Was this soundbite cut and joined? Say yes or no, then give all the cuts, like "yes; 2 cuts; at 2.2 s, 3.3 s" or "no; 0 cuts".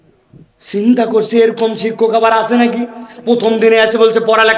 no; 0 cuts